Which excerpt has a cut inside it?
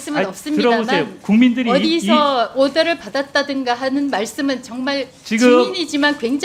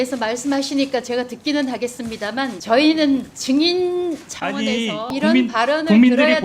second; 3 cuts; at 2.6 s, 3.3 s, 5.1 s

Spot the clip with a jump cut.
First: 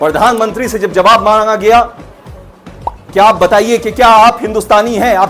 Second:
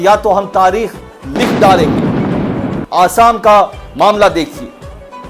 second; 1 cut; at 2.8 s

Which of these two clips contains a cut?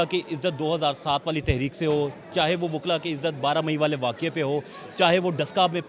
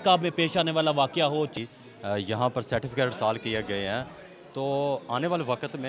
second; 1 cut; at 1.5 s

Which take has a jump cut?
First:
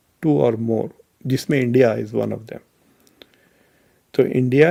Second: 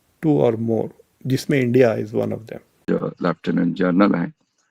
second; 1 cut; at 2.7 s

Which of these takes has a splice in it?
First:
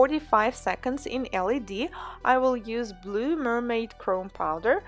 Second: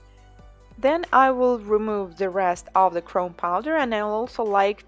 first; 1 cut; at 3.6 s

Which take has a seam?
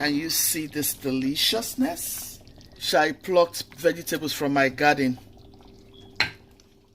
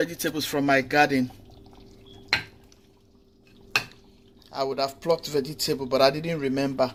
first; 1 cut; at 2.8 s

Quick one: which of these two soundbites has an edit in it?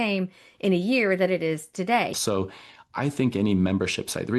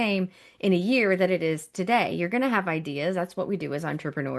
first; 1 cut; at 2.1 s

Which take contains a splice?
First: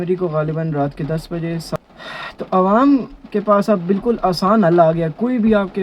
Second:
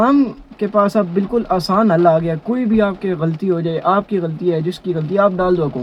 first; 1 cut; at 1.8 s

